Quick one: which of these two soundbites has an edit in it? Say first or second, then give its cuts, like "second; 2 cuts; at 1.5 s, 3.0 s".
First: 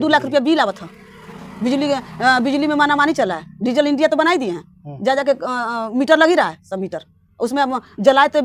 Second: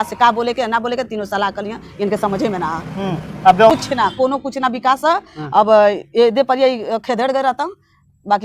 second; 1 cut; at 3.7 s